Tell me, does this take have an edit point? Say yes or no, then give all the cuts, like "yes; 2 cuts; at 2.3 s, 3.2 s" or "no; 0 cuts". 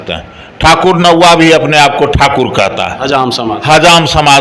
no; 0 cuts